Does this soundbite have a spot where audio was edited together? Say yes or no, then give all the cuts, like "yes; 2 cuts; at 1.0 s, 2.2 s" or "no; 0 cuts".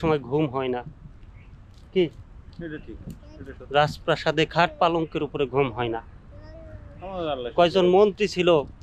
no; 0 cuts